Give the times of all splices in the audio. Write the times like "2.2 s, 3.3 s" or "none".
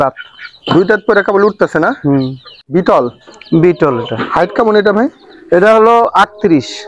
2.7 s